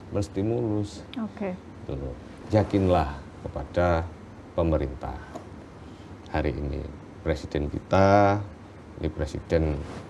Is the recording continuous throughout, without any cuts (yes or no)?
no